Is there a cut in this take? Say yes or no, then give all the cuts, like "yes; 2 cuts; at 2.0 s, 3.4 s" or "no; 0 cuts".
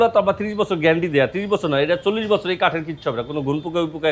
no; 0 cuts